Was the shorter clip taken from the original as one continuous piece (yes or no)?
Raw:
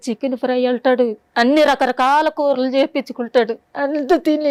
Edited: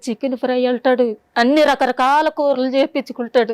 yes